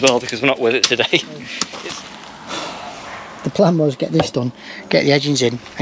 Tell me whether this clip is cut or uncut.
cut